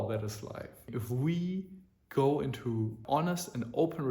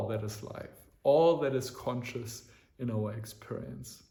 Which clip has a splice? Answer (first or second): first